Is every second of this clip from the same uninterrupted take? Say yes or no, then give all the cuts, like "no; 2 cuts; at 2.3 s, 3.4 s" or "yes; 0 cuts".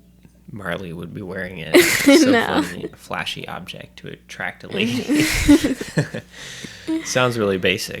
no; 1 cut; at 2.9 s